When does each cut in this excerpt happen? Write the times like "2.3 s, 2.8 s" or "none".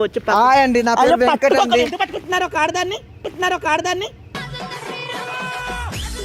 none